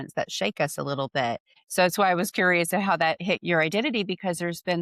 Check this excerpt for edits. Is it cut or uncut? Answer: cut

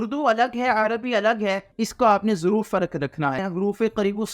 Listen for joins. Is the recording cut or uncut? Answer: cut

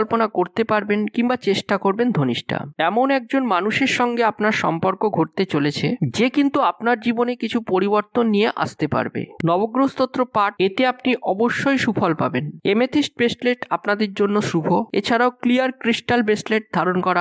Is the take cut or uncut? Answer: cut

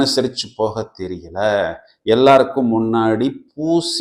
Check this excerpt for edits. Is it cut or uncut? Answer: uncut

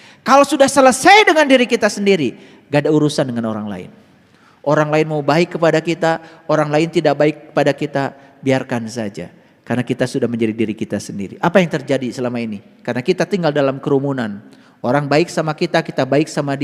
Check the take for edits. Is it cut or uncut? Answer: uncut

